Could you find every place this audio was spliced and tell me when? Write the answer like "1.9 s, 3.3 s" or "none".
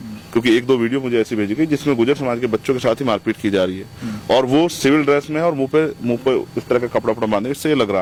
none